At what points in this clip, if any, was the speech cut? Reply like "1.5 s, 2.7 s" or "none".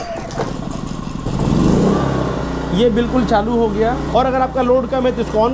4.0 s

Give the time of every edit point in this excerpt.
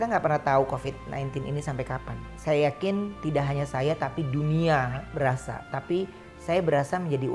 2.2 s, 5.0 s

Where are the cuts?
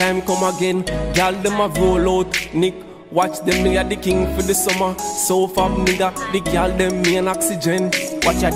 none

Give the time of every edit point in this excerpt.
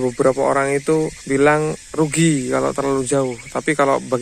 1.2 s

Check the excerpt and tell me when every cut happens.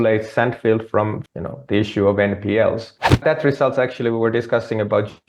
1.2 s, 3.2 s

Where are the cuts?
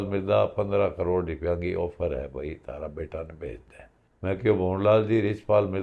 none

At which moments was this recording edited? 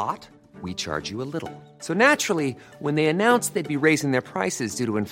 none

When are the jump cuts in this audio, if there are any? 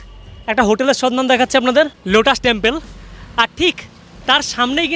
2.0 s

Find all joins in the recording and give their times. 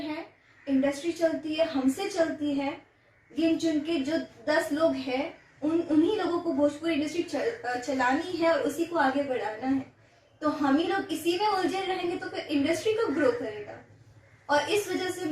none

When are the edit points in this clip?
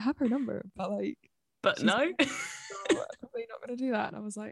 none

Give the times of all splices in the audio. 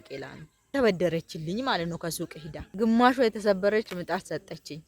2.7 s

